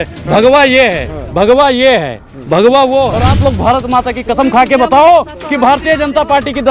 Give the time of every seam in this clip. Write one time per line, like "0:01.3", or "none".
0:03.3